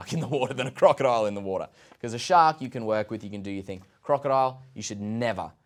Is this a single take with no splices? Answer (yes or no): yes